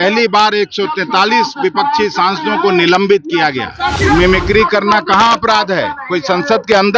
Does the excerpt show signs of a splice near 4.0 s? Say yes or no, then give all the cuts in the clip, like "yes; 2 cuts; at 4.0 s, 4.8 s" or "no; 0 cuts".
yes; 1 cut; at 4.0 s